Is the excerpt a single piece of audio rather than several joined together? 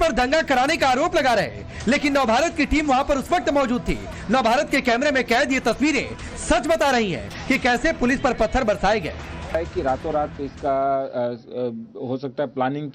no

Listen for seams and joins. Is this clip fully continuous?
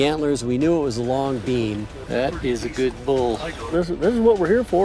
no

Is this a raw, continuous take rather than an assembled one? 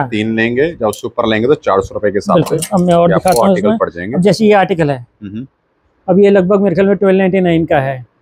yes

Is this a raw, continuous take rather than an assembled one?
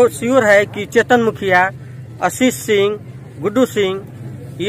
yes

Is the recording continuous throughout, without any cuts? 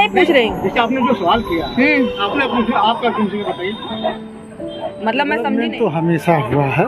no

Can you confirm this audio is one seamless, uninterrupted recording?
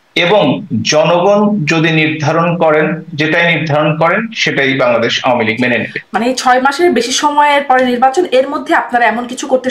yes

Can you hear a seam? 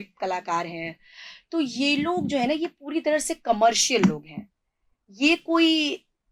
no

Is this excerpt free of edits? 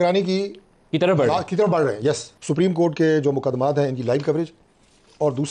no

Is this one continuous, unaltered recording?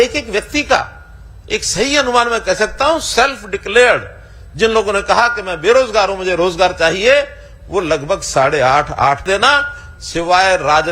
no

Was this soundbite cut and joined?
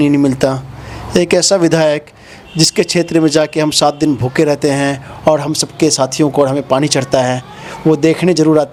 no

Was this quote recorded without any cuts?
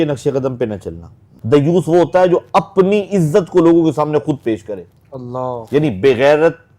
no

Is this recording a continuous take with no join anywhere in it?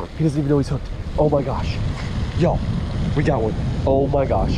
yes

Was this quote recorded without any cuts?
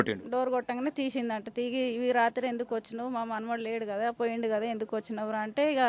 yes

